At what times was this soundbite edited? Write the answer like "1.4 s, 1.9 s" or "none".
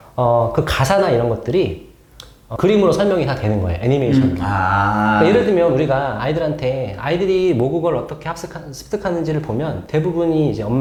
none